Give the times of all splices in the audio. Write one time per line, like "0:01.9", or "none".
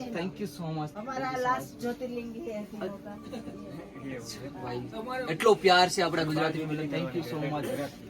0:00.9